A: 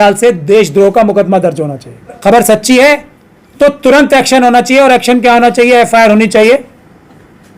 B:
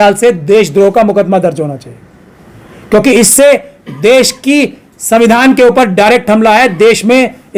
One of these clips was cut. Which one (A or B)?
A